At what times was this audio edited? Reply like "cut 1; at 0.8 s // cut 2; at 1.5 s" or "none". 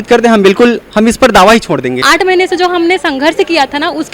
cut 1; at 2.0 s